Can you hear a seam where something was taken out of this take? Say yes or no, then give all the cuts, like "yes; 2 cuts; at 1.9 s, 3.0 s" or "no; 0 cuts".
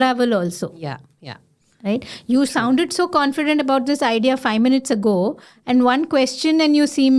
no; 0 cuts